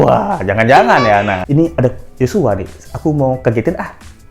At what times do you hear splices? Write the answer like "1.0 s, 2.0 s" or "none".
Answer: 1.4 s